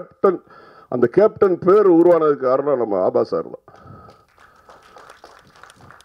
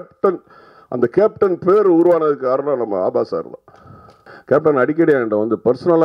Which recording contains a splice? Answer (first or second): second